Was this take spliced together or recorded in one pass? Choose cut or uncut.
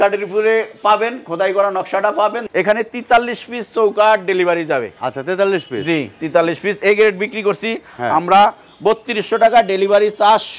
cut